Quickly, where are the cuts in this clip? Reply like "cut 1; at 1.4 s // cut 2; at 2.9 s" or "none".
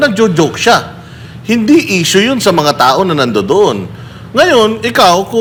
none

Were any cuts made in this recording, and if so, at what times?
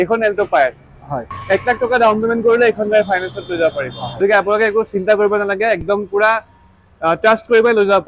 cut 1; at 1.3 s // cut 2; at 4.2 s

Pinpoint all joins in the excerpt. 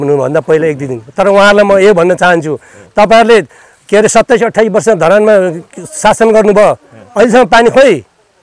none

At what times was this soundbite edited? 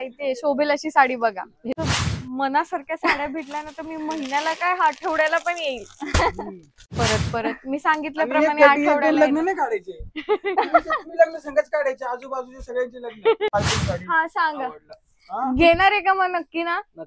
cut 1; at 1.8 s // cut 2; at 6.9 s // cut 3; at 13.5 s

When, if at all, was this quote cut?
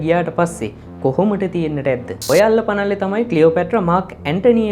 cut 1; at 2.2 s

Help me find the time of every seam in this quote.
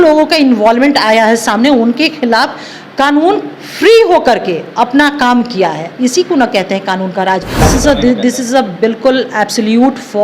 cut 1; at 7.6 s

